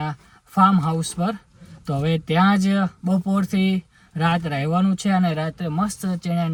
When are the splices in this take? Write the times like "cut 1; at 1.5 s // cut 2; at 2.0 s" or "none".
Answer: none